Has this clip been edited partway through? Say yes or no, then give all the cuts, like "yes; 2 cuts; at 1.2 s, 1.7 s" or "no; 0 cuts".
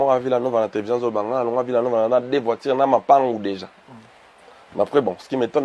no; 0 cuts